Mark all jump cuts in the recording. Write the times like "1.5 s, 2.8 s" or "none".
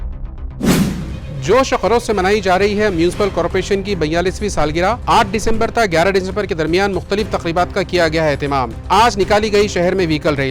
1.1 s